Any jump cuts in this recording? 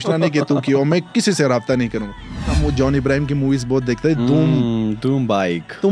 yes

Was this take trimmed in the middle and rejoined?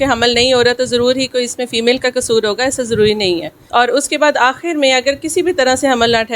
yes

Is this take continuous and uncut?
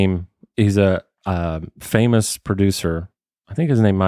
yes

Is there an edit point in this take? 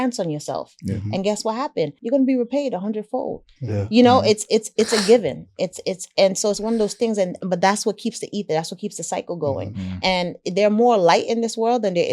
yes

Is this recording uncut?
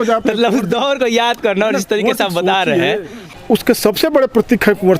no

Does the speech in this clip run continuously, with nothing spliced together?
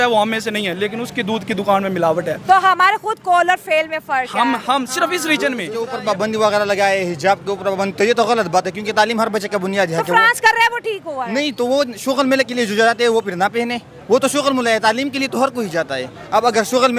no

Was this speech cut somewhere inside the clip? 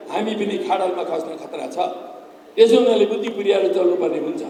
no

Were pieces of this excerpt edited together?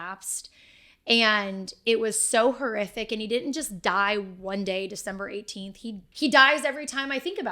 yes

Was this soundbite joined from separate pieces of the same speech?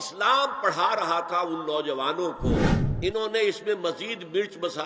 yes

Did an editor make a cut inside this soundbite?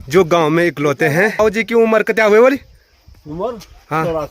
yes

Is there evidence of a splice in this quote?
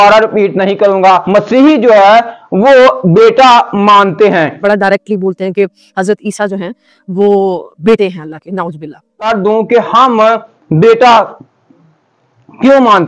yes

